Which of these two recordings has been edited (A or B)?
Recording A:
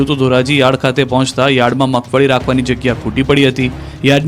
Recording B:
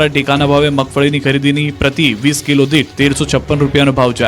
B